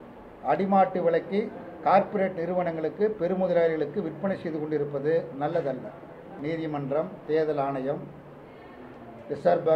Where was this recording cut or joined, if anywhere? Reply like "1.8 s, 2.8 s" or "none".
6.3 s